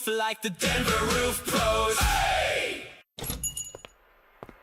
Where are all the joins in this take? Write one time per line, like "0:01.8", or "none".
0:02.9

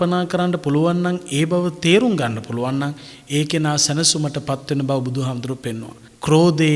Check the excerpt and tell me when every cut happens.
none

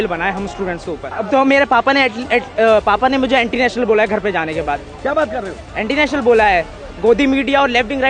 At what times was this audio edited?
0:01.1

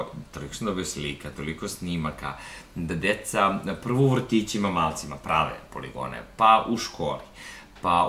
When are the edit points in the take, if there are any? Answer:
none

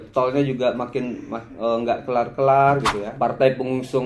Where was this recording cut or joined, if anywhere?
0:03.0

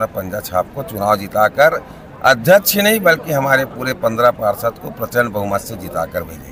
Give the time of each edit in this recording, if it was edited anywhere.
none

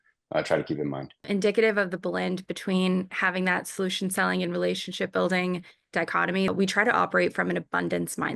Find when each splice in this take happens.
0:01.2
0:06.5

